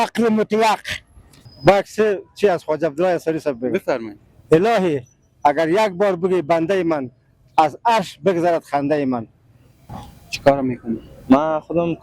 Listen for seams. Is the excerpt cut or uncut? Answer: cut